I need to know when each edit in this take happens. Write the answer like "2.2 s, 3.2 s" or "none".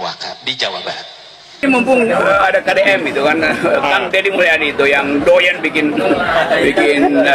1.6 s

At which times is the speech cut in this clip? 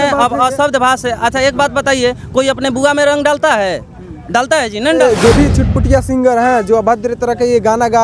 5.0 s

